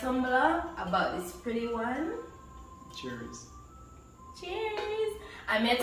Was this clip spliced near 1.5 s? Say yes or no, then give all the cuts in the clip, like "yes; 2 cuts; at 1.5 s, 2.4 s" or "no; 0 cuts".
no; 0 cuts